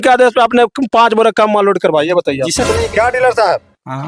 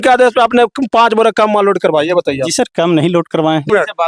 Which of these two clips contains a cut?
first; 1 cut; at 2.7 s

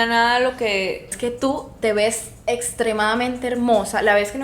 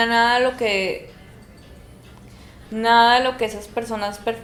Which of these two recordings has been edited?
first; 1 cut; at 1.1 s

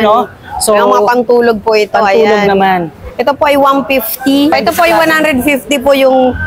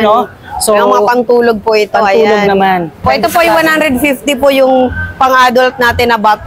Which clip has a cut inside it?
second; 1 cut; at 3.1 s

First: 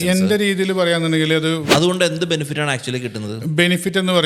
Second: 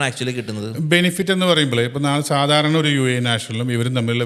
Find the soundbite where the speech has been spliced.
first; 1 cut; at 1.6 s

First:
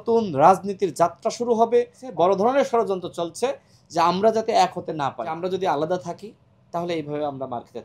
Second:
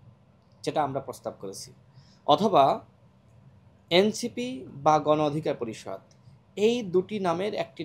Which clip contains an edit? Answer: first; 2 cuts; at 2.0 s, 5.4 s

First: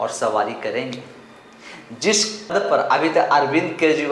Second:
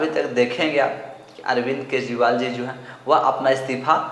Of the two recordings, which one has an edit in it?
first; 1 cut; at 2.5 s

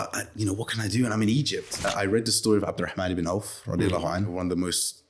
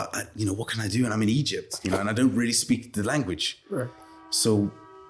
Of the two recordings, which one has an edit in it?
first; 2 cuts; at 1.8 s, 4.3 s

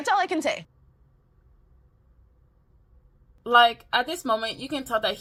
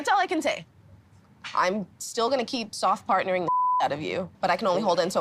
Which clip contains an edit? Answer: second; 2 cuts; at 1.4 s, 4.2 s

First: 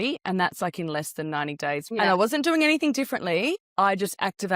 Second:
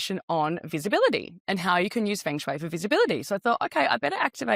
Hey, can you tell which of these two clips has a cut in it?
first; 2 cuts; at 1.9 s, 3.6 s

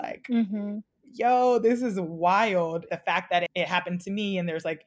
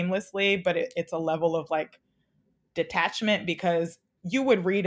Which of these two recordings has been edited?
first; 1 cut; at 3.0 s

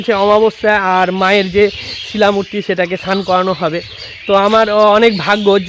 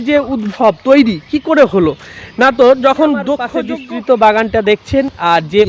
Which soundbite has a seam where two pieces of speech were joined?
second; 1 cut; at 3.5 s

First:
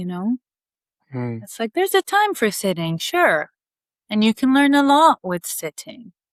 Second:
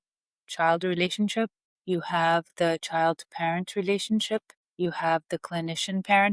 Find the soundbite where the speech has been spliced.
second; 2 cuts; at 1.7 s, 4.6 s

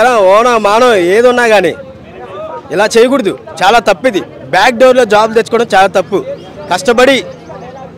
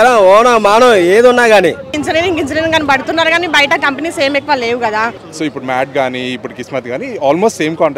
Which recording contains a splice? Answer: second; 2 cuts; at 2.0 s, 5.2 s

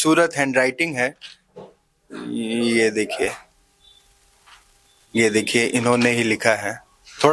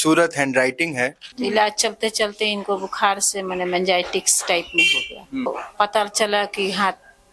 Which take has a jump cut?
second; 2 cuts; at 1.3 s, 5.5 s

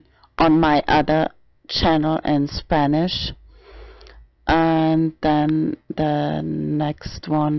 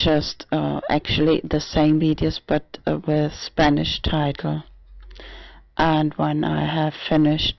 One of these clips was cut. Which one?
first; 1 cut; at 6.4 s

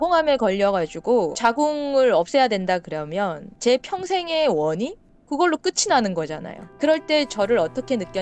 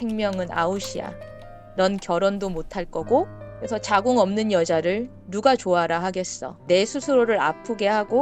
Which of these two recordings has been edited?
first; 1 cut; at 1.3 s

